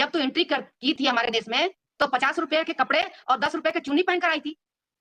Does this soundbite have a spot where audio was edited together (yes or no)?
no